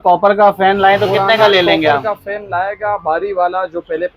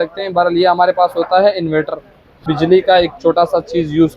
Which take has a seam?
second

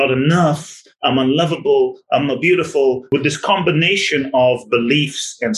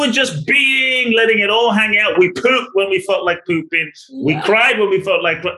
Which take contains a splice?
first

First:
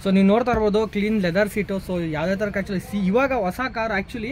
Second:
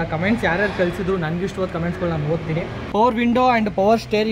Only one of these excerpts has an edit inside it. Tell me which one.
second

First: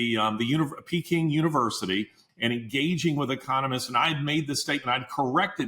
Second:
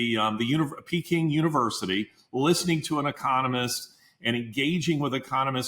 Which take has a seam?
first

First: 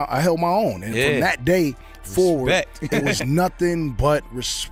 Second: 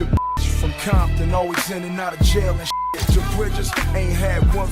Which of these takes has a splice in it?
second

